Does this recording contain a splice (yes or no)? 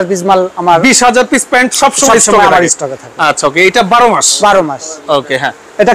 no